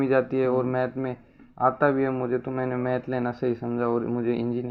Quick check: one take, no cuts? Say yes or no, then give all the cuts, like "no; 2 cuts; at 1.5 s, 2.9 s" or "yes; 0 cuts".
yes; 0 cuts